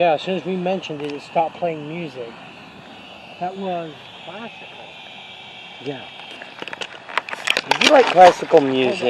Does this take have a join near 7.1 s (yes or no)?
no